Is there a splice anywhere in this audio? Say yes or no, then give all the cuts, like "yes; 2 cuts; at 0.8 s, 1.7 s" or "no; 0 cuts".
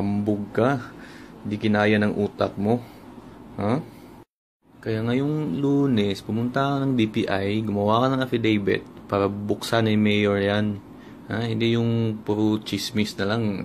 no; 0 cuts